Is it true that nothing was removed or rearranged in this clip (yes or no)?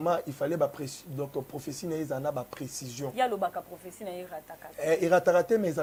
yes